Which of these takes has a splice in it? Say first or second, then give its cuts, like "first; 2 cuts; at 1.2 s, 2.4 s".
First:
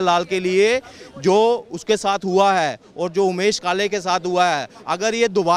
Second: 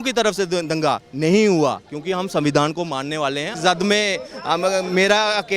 second; 1 cut; at 3.5 s